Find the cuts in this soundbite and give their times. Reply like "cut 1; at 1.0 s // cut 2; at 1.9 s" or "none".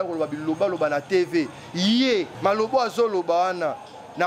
cut 1; at 2.3 s